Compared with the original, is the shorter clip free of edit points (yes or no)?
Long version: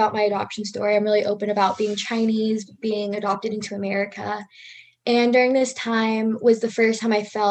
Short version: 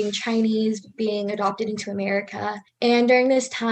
no